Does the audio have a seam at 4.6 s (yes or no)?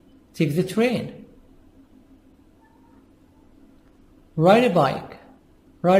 no